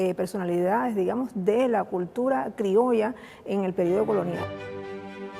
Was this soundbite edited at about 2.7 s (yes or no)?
no